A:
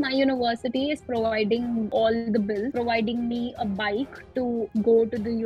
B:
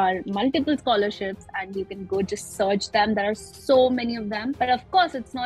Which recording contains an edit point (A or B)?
A